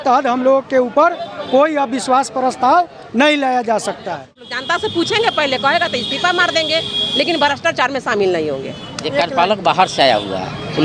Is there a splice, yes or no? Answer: yes